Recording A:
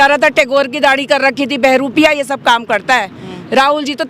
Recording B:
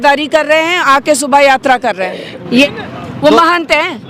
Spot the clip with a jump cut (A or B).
B